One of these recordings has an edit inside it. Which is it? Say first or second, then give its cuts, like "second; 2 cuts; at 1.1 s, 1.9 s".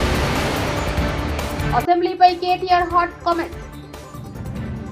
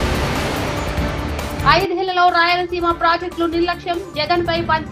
first; 1 cut; at 1.6 s